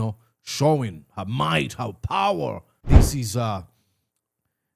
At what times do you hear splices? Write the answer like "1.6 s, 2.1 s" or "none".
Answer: 2.7 s